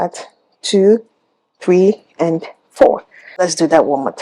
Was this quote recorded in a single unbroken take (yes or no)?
no